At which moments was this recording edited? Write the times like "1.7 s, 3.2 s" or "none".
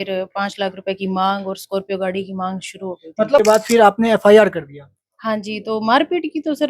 3.4 s